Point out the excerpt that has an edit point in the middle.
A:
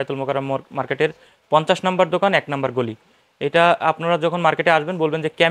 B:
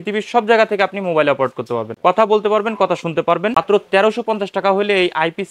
B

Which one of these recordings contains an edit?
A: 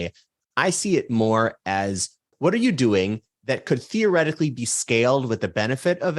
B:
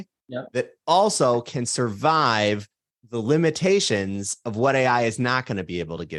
A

